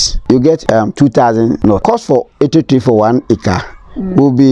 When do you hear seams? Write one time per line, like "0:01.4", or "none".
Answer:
0:01.8